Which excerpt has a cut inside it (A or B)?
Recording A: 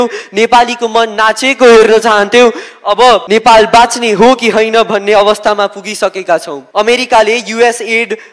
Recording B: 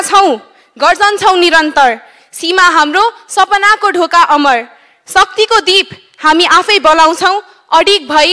A